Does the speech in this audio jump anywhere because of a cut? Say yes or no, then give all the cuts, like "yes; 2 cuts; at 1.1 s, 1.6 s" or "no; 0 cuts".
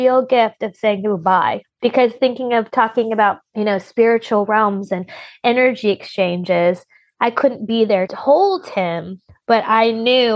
yes; 2 cuts; at 1.7 s, 8.1 s